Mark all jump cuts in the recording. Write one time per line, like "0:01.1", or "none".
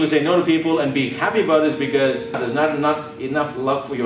0:02.4